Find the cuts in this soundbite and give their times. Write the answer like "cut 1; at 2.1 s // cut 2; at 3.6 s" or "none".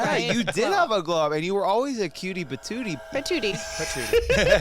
cut 1; at 3.0 s